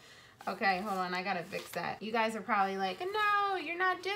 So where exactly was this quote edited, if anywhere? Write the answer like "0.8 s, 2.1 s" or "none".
2.0 s